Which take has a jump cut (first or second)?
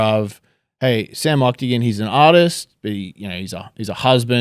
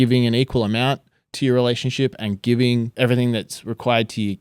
second